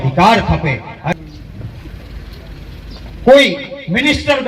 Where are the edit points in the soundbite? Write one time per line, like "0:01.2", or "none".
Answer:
0:01.1